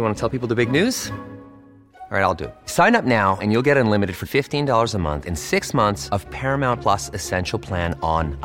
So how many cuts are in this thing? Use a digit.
0